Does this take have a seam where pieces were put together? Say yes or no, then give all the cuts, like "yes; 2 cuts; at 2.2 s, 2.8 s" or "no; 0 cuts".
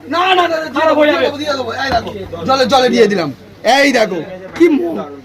no; 0 cuts